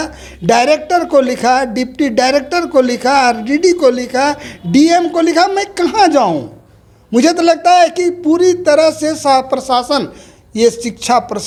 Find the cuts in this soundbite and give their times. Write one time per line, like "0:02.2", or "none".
none